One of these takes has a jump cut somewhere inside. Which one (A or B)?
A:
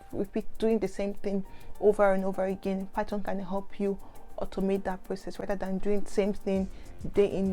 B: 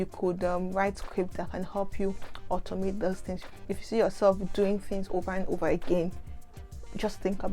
B